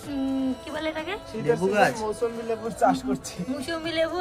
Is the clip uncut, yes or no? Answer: yes